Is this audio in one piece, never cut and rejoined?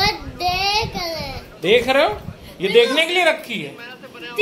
no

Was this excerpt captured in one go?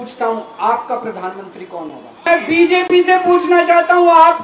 no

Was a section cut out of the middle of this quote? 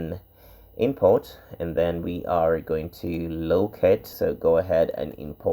yes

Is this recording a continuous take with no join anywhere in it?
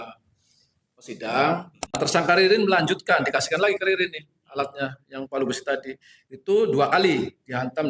no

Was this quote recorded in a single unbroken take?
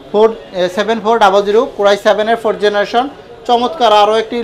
yes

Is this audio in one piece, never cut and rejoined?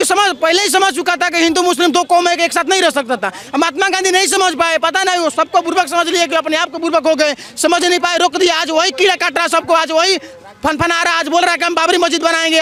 yes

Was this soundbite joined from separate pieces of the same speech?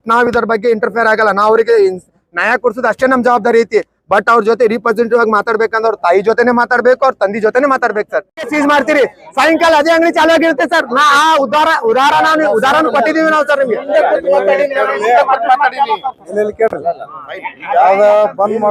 no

